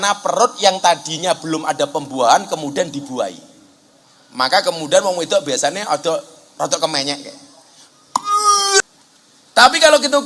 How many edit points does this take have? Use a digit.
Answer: 1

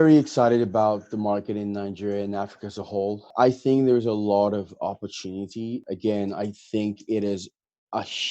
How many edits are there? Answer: 2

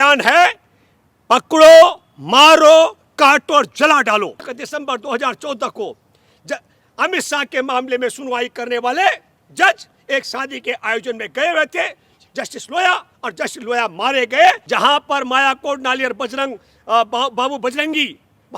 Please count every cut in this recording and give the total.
2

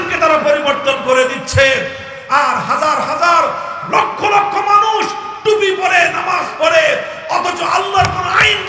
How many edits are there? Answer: 0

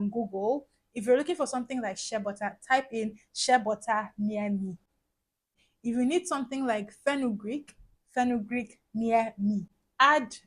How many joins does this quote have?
1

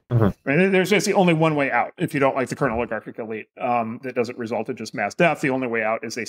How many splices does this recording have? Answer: 0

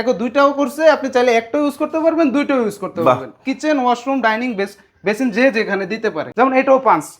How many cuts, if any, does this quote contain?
1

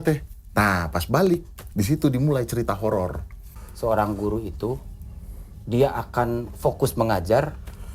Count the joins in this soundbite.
1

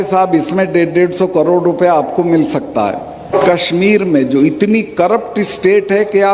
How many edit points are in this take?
1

